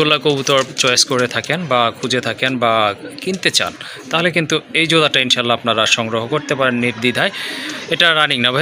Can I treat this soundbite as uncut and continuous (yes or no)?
yes